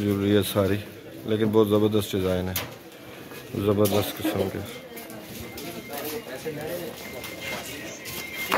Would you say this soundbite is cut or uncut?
uncut